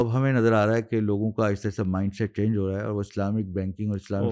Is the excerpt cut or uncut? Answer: uncut